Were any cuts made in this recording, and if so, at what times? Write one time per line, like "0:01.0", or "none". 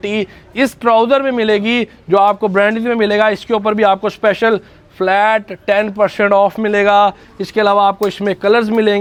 none